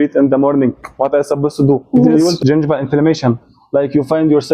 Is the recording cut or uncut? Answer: cut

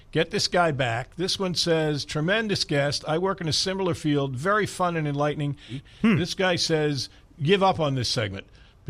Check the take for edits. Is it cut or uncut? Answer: cut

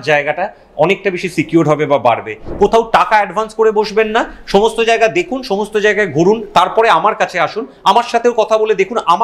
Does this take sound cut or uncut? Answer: cut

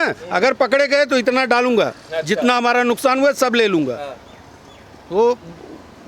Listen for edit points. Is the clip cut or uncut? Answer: uncut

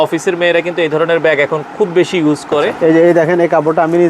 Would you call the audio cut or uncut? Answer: cut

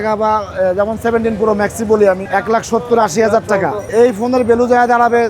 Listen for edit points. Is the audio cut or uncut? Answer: cut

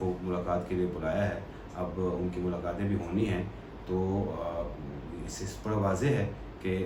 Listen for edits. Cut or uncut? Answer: uncut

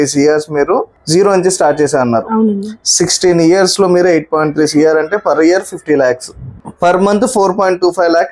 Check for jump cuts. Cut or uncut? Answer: cut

